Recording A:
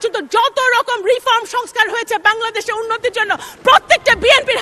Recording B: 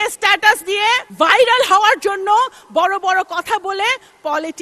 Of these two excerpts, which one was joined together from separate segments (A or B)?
B